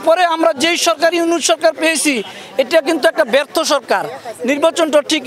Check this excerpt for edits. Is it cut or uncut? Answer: uncut